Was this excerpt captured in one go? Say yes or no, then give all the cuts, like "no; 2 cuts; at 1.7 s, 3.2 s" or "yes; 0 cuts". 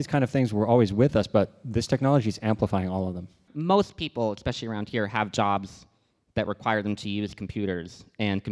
no; 1 cut; at 3.5 s